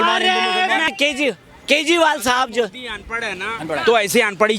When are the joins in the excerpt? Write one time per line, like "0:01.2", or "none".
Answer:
0:00.9